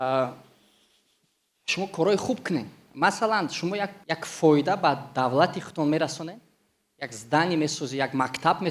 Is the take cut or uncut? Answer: cut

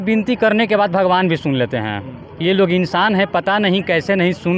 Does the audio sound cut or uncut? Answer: uncut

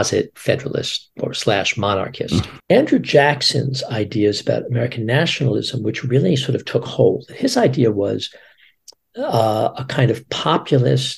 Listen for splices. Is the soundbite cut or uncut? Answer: cut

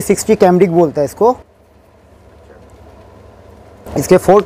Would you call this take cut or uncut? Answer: uncut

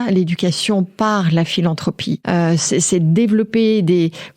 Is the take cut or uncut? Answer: uncut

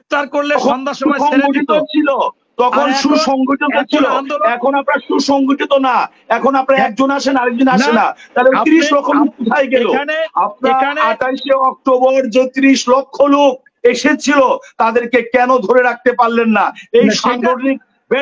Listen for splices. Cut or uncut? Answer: uncut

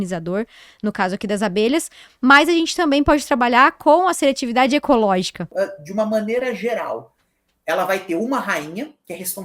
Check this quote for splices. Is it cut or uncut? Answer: cut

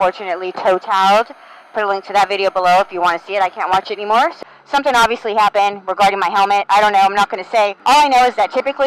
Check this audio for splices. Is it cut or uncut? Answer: cut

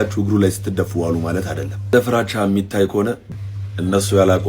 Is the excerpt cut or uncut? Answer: cut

